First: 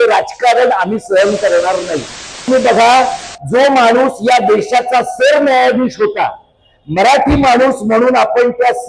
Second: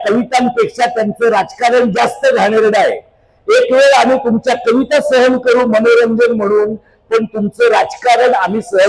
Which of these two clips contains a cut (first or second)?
first